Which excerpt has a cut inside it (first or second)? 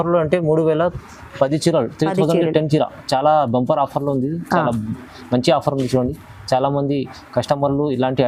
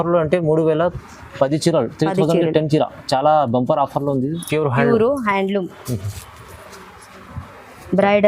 second